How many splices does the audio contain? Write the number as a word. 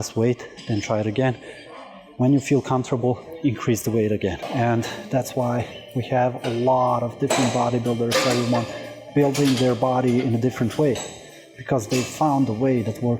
one